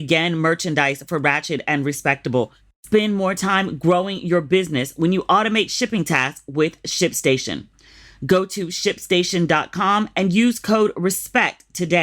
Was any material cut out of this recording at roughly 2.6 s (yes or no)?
yes